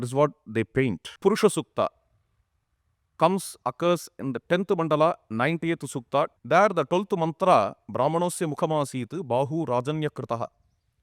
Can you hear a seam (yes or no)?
yes